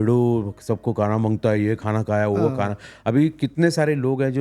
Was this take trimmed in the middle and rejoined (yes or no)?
no